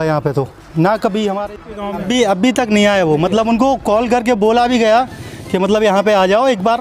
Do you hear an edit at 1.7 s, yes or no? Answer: yes